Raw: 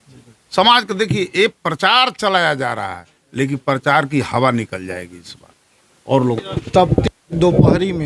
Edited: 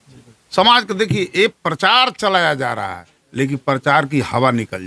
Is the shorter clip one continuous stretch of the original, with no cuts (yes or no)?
yes